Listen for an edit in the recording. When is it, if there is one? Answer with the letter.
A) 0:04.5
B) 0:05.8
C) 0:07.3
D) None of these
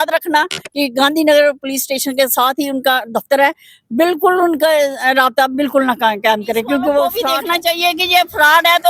C